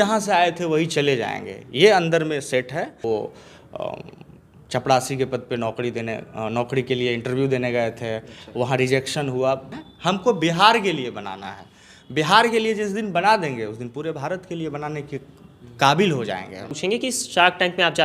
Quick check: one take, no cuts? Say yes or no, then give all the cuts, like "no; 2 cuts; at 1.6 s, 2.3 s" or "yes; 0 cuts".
no; 3 cuts; at 3.0 s, 9.8 s, 16.7 s